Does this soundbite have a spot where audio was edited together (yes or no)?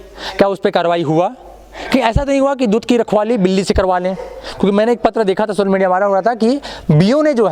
no